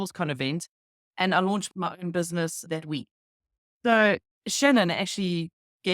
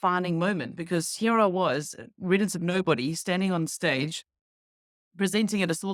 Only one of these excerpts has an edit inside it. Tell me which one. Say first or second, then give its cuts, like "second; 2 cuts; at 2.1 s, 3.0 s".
first; 1 cut; at 2.6 s